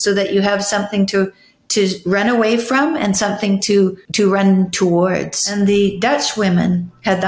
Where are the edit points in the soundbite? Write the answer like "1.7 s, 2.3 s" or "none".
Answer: 4.0 s, 5.5 s